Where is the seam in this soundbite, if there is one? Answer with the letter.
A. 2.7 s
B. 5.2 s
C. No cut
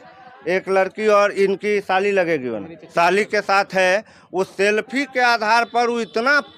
C